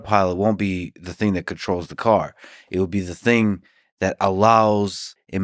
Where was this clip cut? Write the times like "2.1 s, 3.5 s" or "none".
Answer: none